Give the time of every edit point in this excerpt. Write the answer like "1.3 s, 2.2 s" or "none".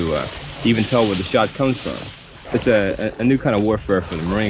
2.5 s